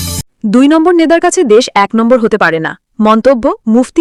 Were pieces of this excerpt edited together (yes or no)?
no